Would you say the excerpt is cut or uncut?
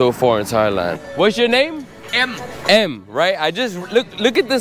cut